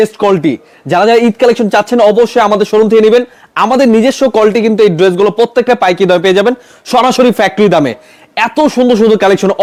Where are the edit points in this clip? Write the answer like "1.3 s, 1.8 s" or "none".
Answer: none